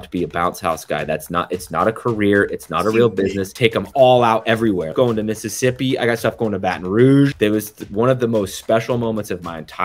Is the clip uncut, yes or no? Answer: no